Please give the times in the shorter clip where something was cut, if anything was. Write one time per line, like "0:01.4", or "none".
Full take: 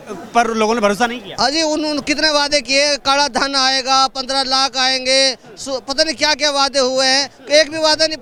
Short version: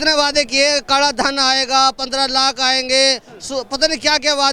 none

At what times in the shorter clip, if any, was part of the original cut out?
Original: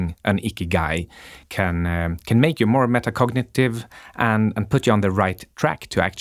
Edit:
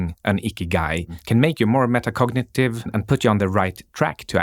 0:01.2
0:02.9

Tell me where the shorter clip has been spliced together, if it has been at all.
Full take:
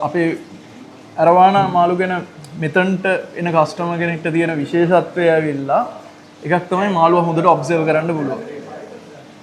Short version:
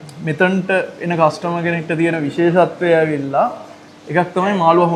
none

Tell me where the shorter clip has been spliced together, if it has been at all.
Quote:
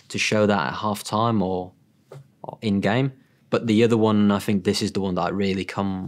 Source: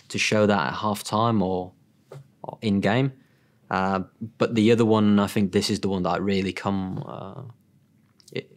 0:03.3

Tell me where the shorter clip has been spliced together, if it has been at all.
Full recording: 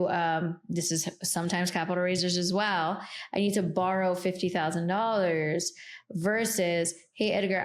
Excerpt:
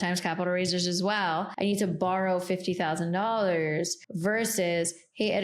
0:01.5
0:04.0

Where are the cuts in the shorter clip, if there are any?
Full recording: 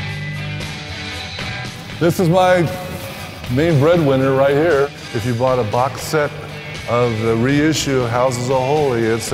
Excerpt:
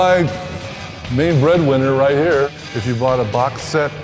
none

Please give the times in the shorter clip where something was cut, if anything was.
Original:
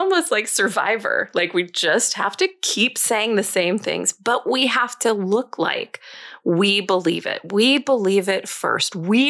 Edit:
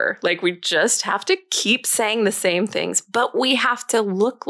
none

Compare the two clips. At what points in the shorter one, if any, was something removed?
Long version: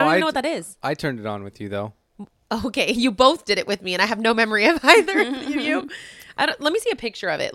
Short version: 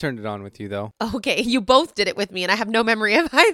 0:00.9

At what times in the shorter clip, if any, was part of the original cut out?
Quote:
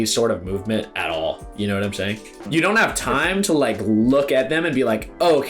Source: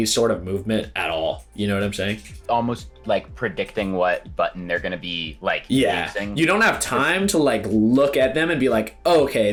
0:02.3

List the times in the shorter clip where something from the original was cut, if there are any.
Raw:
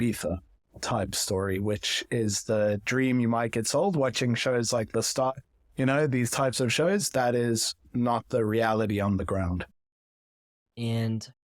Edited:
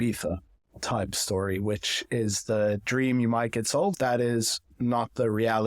0:03.9

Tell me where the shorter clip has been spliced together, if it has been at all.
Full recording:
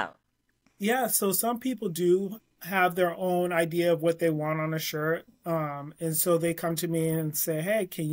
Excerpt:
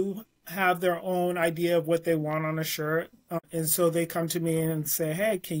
0:03.4

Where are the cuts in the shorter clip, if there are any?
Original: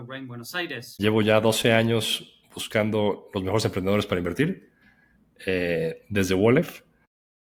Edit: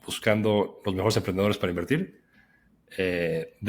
none

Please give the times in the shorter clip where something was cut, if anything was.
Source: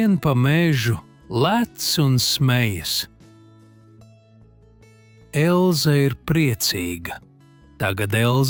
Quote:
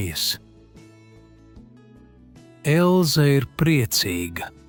none

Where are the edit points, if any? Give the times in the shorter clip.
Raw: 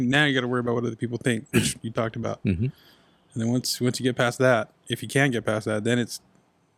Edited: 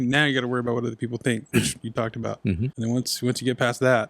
0:02.7

